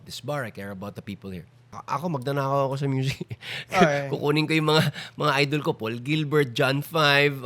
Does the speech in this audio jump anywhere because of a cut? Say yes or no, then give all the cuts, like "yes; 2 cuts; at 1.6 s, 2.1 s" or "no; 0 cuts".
yes; 1 cut; at 1.8 s